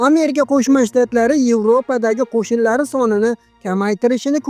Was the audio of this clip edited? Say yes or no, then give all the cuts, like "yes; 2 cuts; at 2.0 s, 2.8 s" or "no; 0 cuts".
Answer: no; 0 cuts